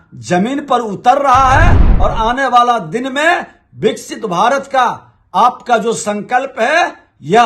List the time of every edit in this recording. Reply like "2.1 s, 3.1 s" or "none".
1.8 s